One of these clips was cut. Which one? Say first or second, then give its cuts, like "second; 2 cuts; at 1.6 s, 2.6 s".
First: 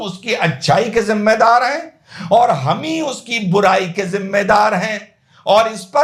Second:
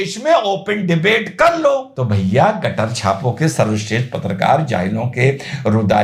second; 1 cut; at 1.9 s